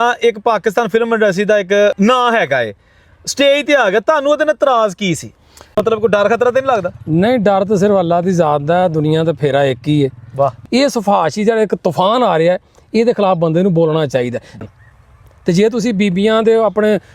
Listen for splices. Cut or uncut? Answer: cut